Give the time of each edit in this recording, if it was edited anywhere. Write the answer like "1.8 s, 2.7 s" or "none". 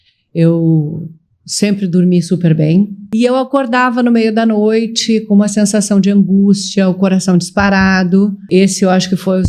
3.0 s, 8.4 s